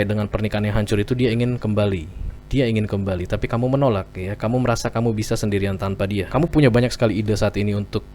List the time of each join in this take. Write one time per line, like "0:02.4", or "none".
0:06.3